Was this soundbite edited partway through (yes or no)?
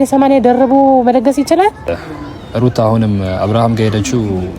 yes